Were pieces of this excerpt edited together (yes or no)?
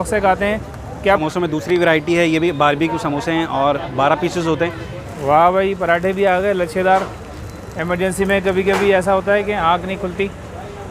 yes